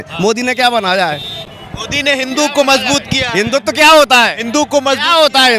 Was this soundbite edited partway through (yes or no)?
no